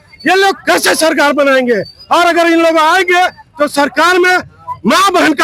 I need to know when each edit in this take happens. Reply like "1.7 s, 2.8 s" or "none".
none